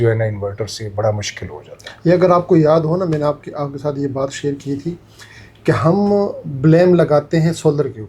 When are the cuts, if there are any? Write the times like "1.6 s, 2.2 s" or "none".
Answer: none